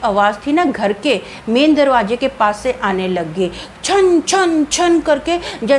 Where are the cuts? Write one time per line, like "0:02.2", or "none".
none